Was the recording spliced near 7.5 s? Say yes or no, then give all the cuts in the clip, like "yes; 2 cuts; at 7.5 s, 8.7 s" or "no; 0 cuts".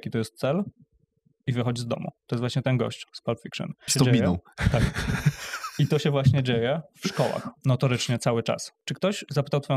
yes; 4 cuts; at 2.2 s, 3.9 s, 7.5 s, 8.8 s